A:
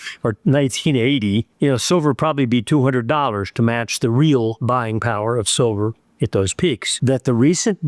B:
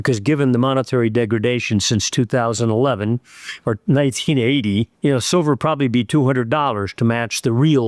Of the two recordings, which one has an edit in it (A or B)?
A